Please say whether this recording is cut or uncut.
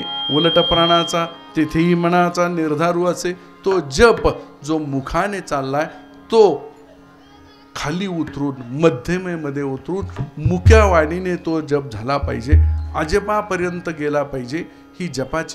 uncut